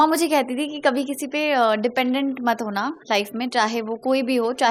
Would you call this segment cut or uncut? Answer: uncut